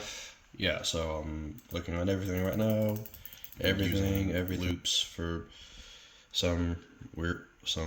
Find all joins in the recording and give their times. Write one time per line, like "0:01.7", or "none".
0:04.6